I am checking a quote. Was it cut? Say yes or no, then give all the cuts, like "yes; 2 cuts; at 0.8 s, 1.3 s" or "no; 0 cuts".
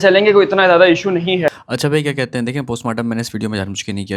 yes; 1 cut; at 1.6 s